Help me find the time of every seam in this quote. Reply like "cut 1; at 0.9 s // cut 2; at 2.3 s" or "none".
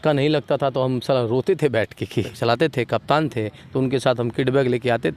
cut 1; at 2.3 s